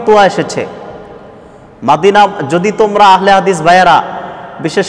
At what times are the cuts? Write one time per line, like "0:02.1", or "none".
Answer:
none